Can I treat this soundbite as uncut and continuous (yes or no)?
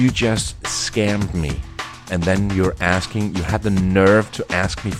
no